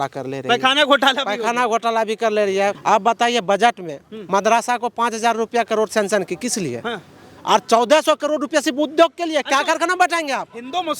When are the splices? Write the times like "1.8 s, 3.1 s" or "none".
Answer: 2.8 s